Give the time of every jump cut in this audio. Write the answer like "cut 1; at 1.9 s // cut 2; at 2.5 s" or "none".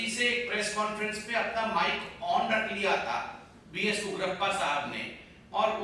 none